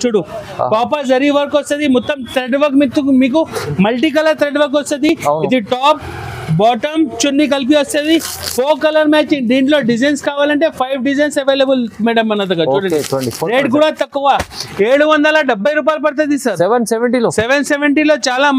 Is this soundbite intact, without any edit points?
yes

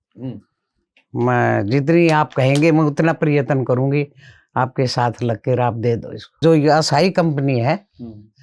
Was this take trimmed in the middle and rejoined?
yes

